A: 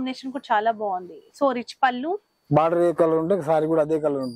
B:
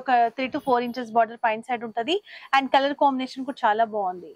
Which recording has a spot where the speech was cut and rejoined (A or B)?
A